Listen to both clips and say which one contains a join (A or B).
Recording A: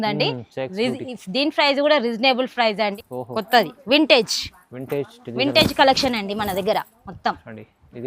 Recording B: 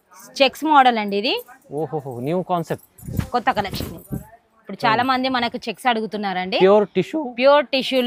A